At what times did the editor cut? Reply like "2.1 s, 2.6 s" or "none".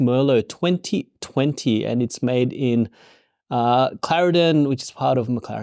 none